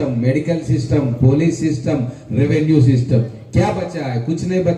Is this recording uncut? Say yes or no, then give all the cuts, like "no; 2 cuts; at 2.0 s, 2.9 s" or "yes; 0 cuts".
yes; 0 cuts